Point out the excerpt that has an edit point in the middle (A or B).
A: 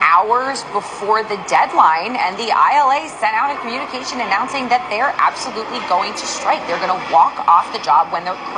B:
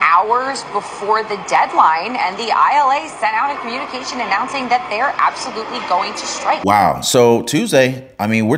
B